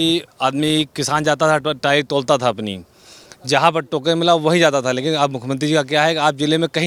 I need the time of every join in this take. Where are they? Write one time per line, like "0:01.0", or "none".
none